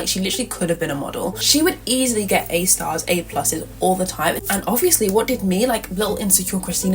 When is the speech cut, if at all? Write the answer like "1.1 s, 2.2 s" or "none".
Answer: 1.4 s, 4.4 s